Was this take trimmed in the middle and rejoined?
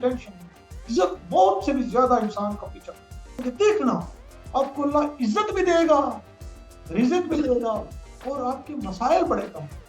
yes; 1 cut; at 3.4 s

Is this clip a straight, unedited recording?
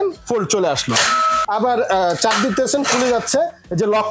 no; 1 cut; at 1.3 s

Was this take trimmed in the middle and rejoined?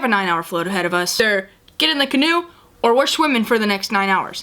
yes; 1 cut; at 1.2 s

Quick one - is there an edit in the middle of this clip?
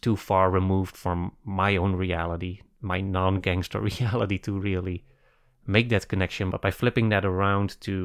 yes; 1 cut; at 6.5 s

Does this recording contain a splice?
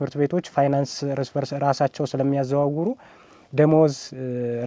no; 0 cuts

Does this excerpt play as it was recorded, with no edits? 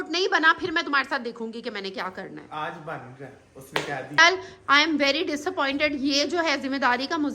no; 1 cut; at 4.2 s

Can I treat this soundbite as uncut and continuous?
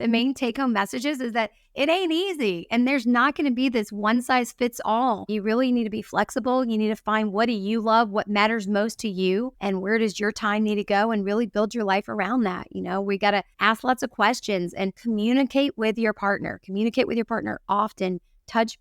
no; 4 cuts; at 5.3 s, 9.5 s, 13.5 s, 15.0 s

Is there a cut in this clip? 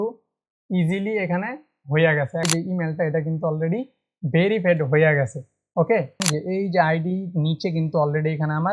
yes; 2 cuts; at 2.4 s, 6.2 s

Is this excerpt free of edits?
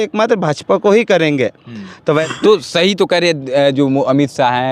no; 1 cut; at 2.3 s

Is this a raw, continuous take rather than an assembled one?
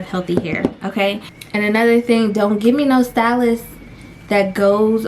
no; 1 cut; at 1.3 s

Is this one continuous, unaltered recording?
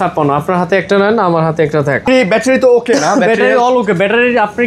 no; 1 cut; at 2.0 s

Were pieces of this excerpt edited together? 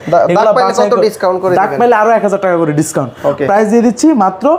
no; 0 cuts

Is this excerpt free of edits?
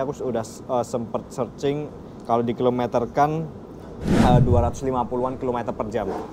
yes; 0 cuts

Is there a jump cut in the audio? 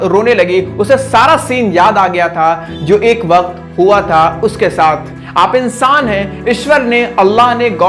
yes; 1 cut; at 5.2 s

